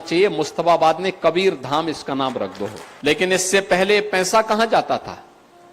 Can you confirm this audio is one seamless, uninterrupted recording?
no; 1 cut; at 2.8 s

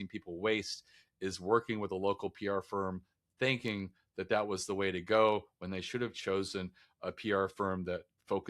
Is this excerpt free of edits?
yes; 0 cuts

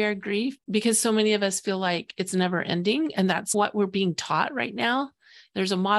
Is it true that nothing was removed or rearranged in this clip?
no; 1 cut; at 3.5 s

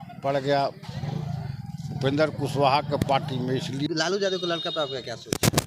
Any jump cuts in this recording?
yes; 1 cut; at 3.9 s

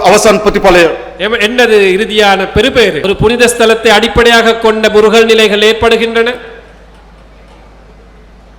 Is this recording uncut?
no; 1 cut; at 3.0 s

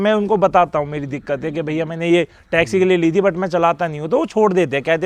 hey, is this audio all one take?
yes; 0 cuts

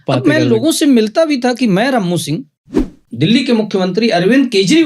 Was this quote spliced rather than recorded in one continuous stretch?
yes; 1 cut; at 3.1 s

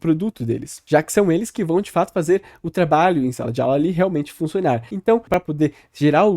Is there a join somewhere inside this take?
yes; 1 cut; at 5.3 s

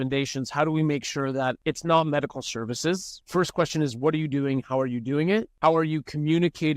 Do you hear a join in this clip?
yes; 3 cuts; at 1.6 s, 3.2 s, 5.5 s

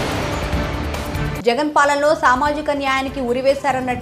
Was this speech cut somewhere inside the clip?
yes; 1 cut; at 1.1 s

